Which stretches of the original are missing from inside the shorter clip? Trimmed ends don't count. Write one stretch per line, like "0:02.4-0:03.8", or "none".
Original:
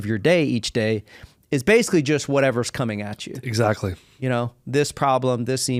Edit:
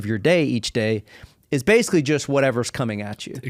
none